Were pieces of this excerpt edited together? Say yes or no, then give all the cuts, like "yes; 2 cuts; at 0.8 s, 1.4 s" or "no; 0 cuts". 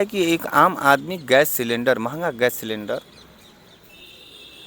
no; 0 cuts